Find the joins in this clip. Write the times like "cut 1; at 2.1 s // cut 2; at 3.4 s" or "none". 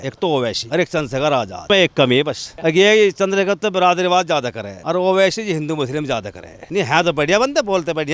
none